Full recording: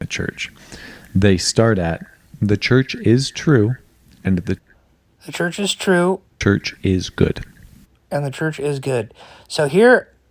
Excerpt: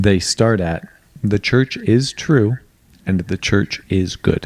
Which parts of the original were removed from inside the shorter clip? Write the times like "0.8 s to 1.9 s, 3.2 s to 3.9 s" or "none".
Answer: 4.6 s to 6.4 s